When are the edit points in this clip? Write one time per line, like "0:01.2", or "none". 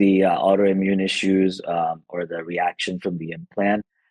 none